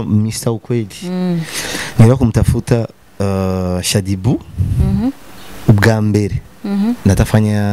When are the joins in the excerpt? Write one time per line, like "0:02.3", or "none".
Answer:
none